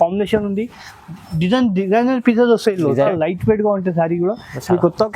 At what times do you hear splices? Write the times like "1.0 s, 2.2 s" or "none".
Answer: 3.1 s